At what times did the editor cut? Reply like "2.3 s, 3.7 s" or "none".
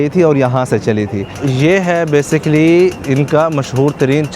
1.4 s, 3.0 s